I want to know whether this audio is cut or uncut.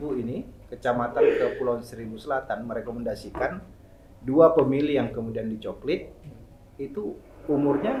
uncut